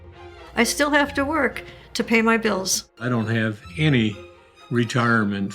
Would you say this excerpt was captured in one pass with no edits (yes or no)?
no